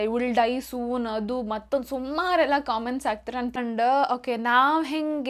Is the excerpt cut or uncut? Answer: cut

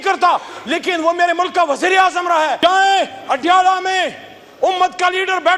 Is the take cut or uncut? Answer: cut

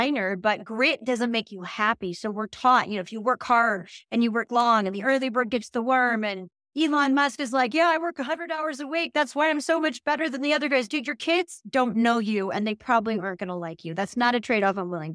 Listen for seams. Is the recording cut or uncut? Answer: uncut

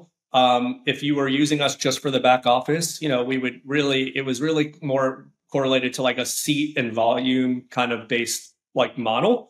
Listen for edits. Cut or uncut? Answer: uncut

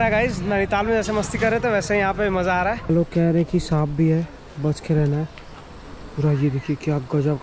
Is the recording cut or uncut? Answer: cut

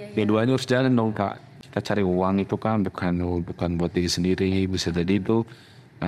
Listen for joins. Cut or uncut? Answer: cut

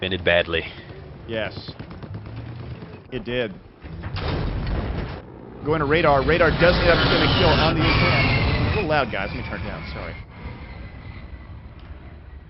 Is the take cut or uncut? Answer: cut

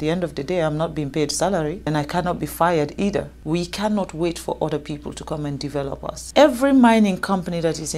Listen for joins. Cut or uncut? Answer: cut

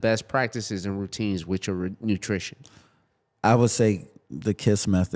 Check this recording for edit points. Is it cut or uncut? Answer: uncut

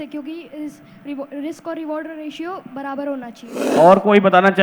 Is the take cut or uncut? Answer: cut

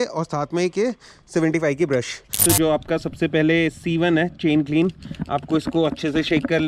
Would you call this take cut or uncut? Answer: cut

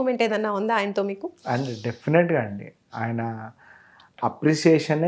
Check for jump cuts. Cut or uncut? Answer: uncut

